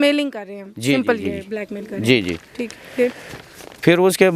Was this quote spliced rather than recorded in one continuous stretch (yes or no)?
no